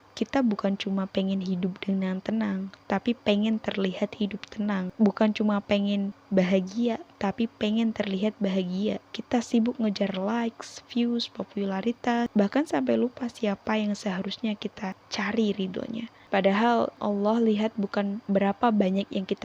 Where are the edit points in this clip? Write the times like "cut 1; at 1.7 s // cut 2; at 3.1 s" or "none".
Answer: cut 1; at 4.9 s // cut 2; at 6.2 s // cut 3; at 9.1 s // cut 4; at 12.3 s // cut 5; at 15.0 s // cut 6; at 16.1 s // cut 7; at 17.0 s // cut 8; at 18.2 s